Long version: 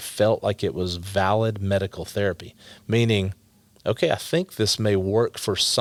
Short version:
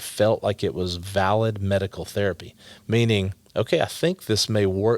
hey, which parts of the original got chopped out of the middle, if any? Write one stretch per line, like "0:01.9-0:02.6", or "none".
0:03.4-0:03.7

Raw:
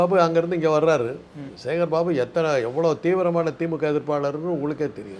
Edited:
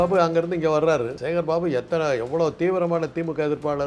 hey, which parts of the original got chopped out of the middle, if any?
0:01.2-0:01.6

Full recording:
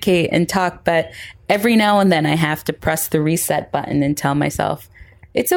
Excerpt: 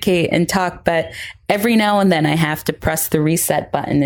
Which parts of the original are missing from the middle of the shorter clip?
none

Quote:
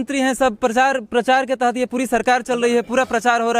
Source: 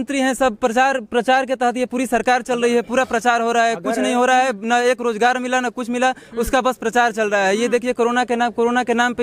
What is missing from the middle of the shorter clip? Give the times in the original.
none

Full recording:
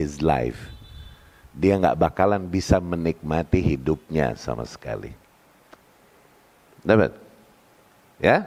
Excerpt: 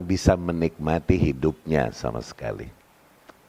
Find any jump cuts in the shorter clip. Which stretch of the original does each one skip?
none

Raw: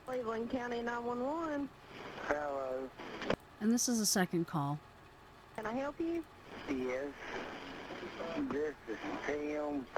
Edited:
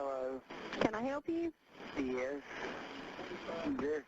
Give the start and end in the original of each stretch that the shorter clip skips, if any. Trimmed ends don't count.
0:03.4-0:05.6

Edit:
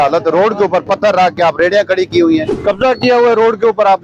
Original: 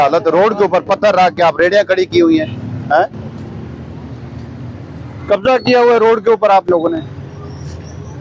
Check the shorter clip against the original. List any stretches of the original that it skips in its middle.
0:02.5-0:05.2

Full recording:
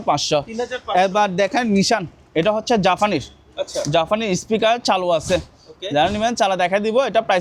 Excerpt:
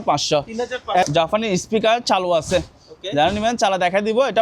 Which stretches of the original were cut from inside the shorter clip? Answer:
0:01.0-0:03.8

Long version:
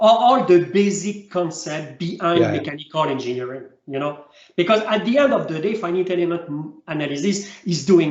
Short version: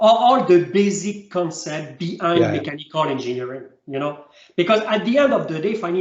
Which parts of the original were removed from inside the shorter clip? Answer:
none

